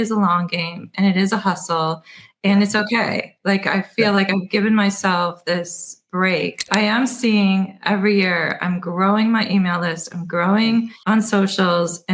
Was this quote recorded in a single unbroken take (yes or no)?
no